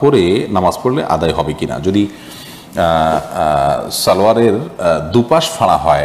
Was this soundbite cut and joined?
no; 0 cuts

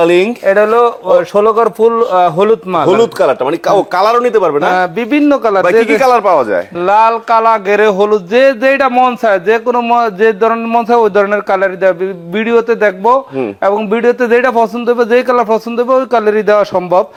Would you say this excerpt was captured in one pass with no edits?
yes; 0 cuts

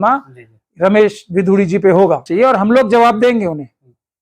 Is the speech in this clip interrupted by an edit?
yes; 1 cut; at 2.3 s

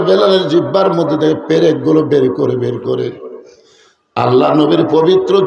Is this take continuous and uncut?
yes; 0 cuts

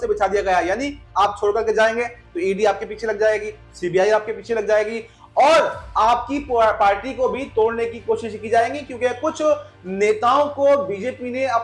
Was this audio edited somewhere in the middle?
no; 0 cuts

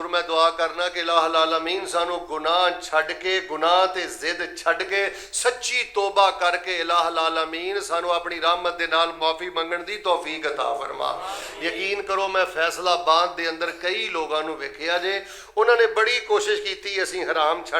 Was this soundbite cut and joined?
no; 0 cuts

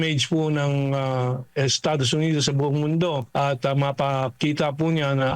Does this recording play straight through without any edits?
no; 1 cut; at 3.2 s

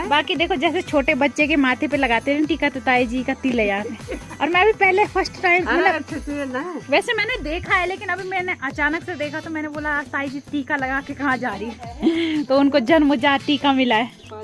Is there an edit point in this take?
no; 0 cuts

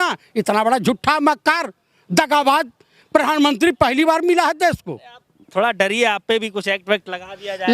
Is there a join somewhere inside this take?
no; 0 cuts

